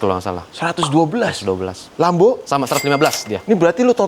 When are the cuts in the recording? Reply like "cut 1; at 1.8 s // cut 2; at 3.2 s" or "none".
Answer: cut 1; at 1.8 s